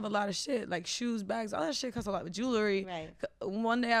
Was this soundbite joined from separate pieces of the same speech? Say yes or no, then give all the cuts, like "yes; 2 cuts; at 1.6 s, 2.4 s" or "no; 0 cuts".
no; 0 cuts